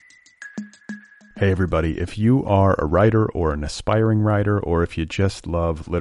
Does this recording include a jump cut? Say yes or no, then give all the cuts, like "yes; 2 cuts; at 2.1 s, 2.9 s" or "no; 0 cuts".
yes; 1 cut; at 0.9 s